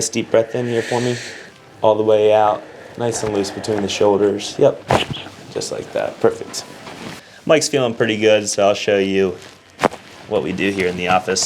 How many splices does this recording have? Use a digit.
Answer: 1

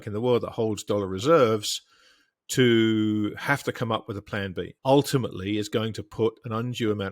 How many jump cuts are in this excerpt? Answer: 1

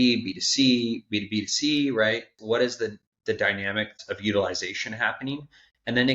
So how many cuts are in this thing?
1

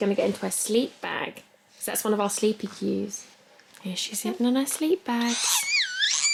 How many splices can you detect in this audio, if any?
0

